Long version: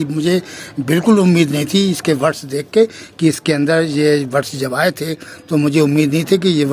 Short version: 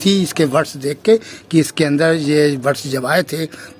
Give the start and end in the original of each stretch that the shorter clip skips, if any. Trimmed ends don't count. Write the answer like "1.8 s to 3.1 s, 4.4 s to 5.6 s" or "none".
none

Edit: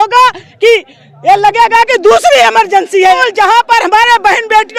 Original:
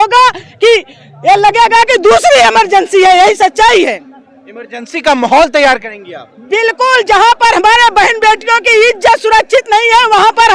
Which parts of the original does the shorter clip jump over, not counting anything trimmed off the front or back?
3.2 s to 6.9 s

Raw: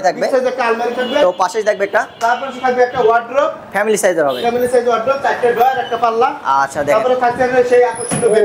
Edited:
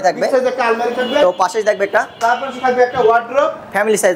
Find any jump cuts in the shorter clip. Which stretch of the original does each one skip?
none

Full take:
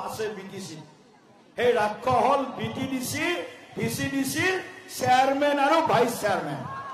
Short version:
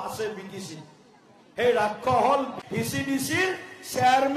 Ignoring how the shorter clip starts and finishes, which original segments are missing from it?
2.6 s to 3.6 s

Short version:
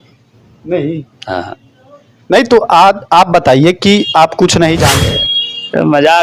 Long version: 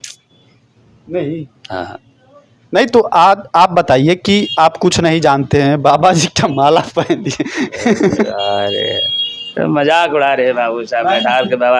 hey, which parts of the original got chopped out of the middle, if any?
5.4 s to 8.8 s

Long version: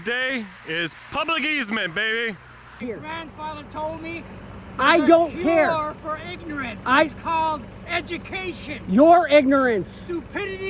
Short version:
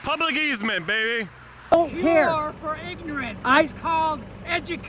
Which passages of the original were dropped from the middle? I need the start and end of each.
2.8 s to 5.1 s

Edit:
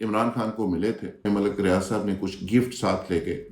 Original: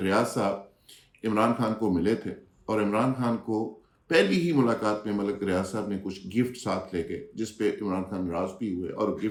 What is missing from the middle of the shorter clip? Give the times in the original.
2.4 s to 5.0 s

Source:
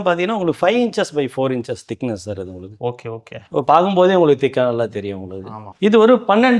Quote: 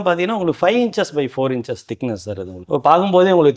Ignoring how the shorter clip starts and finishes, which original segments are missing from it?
2.5 s to 3.4 s

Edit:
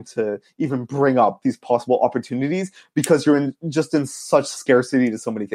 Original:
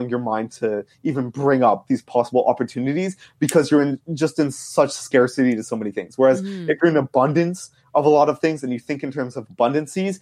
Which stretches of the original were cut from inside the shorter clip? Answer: none

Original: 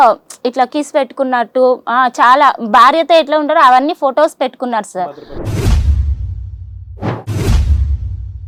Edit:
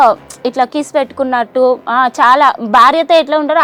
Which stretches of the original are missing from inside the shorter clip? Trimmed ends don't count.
none

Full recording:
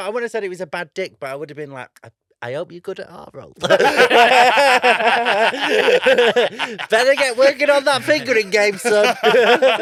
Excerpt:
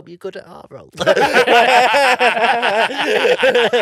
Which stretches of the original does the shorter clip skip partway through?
none

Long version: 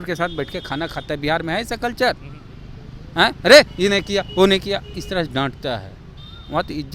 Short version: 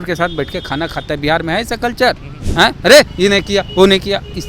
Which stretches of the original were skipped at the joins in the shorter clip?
2.3 s to 2.9 s

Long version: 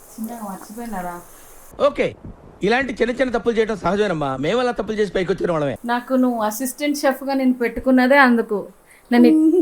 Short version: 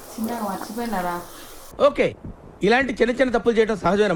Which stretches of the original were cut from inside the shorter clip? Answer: none

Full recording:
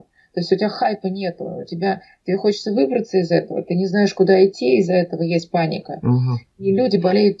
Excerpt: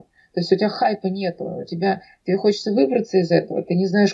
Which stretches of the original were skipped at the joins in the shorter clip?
none

